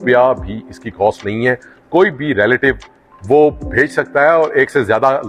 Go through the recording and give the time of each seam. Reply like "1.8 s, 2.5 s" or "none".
none